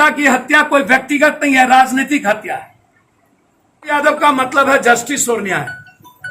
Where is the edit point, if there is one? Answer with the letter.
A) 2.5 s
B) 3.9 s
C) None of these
B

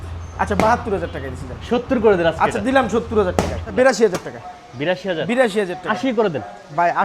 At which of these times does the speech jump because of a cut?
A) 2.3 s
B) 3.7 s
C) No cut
B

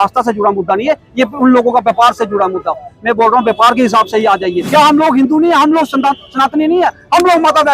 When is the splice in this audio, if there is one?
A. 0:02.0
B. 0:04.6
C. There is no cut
B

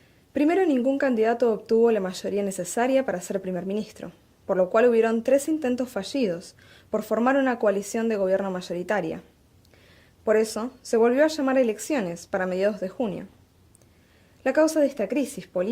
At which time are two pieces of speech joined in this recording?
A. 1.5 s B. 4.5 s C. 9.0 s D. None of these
B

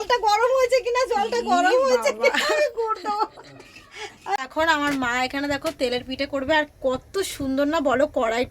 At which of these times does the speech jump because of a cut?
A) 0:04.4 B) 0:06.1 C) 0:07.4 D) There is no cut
A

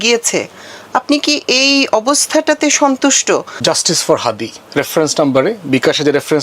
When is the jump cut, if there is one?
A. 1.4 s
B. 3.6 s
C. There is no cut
B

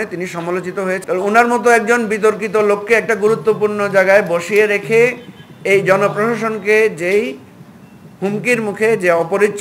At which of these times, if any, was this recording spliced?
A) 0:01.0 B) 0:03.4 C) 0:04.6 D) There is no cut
A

